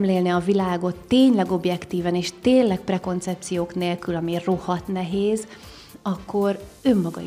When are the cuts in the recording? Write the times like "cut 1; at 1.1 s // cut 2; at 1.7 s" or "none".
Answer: none